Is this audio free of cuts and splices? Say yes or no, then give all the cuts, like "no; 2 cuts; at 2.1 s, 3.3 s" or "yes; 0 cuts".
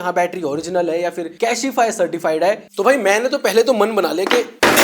no; 1 cut; at 2.6 s